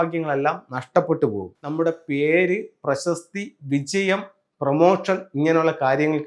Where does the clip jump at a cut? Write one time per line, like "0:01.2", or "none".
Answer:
0:01.5

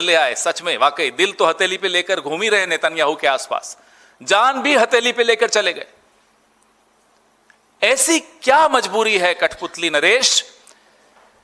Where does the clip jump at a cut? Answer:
none

